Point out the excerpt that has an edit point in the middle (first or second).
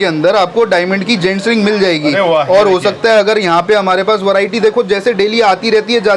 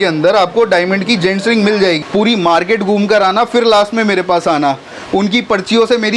second